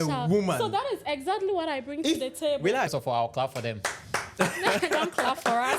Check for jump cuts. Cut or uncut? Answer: cut